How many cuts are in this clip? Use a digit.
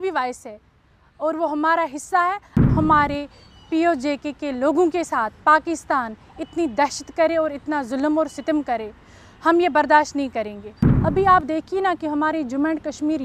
2